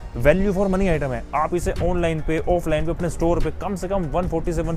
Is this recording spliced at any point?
no; 0 cuts

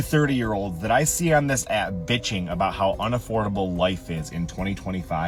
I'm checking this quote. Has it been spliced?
no; 0 cuts

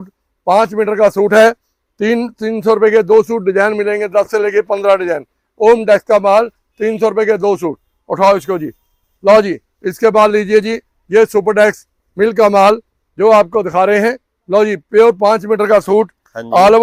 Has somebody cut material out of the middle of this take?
no; 0 cuts

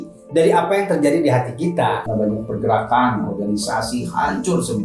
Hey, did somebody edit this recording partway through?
yes; 1 cut; at 2.0 s

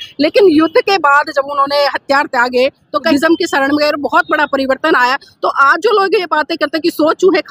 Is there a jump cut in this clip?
yes; 1 cut; at 3.1 s

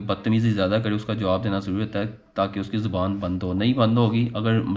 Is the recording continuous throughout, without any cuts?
yes; 0 cuts

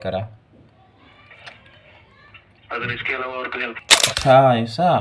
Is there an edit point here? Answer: yes; 1 cut; at 3.8 s

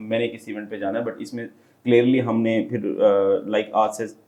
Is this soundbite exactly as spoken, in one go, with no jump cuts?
yes; 0 cuts

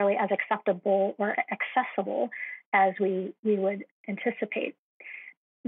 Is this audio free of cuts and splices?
yes; 0 cuts

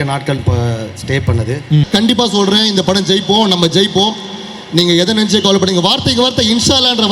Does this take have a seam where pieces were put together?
yes; 1 cut; at 1.9 s

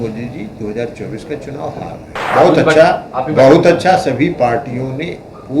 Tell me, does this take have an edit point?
yes; 1 cut; at 2.2 s

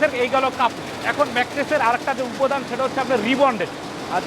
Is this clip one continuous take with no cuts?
yes; 0 cuts

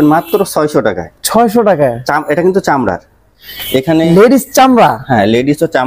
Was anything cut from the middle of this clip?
no; 0 cuts

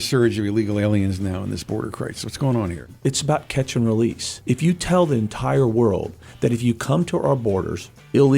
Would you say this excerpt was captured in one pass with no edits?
no; 2 cuts; at 2.9 s, 4.3 s

